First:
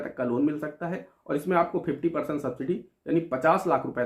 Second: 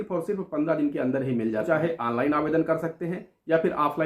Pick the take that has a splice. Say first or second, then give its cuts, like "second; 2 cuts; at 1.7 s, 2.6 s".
second; 1 cut; at 1.7 s